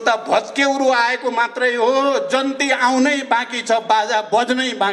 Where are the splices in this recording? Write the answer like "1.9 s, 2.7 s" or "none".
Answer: none